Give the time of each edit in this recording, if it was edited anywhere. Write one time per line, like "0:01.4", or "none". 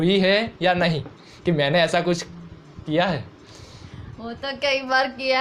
none